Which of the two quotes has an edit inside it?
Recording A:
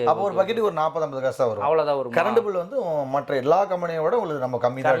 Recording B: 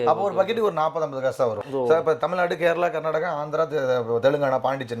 B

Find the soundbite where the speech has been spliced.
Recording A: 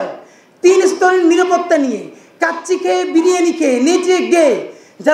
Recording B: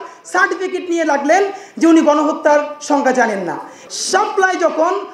B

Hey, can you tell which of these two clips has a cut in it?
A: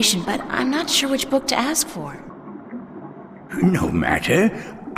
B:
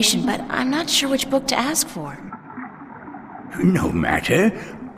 B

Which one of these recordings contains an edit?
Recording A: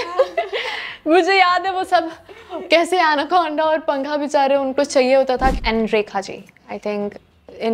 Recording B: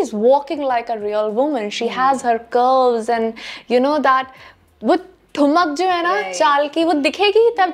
A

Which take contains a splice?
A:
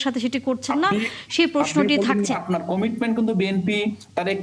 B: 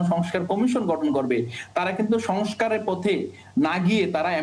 A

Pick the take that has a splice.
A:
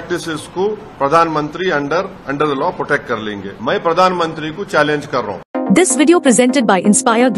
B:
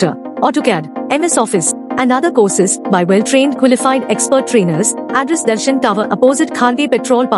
A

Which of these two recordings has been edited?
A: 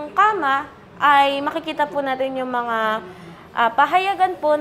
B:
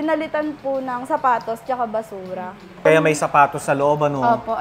B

